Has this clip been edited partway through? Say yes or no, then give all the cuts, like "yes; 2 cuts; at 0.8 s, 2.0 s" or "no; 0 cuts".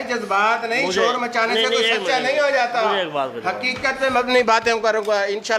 no; 0 cuts